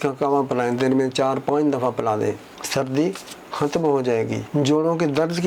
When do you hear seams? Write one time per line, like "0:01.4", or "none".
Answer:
0:04.4